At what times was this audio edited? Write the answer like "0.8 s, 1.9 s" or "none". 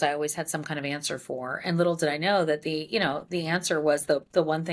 none